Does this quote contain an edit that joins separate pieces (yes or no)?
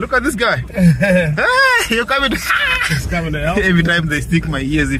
no